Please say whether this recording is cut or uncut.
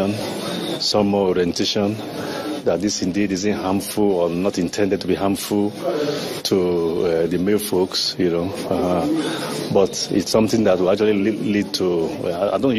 uncut